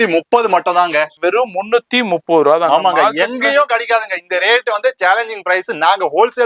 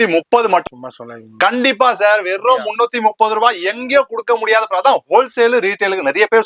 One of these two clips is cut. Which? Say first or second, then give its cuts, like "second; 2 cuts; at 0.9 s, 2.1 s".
first; 1 cut; at 1.1 s